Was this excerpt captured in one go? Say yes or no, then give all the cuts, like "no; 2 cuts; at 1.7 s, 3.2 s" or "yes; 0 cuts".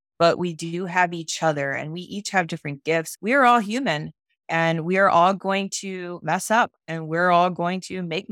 no; 1 cut; at 3.1 s